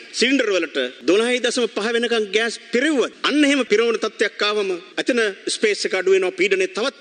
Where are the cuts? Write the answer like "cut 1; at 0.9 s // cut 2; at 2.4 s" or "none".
cut 1; at 3.6 s // cut 2; at 4.9 s